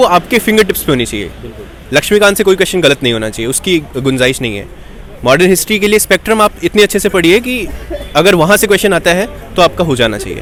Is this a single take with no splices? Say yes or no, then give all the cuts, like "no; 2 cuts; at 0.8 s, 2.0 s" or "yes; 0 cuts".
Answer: yes; 0 cuts